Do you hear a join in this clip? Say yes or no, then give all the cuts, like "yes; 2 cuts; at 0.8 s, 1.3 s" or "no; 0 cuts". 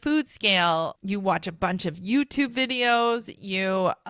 yes; 1 cut; at 1.0 s